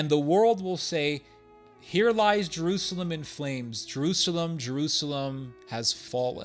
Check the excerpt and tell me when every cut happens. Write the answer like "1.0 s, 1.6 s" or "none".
none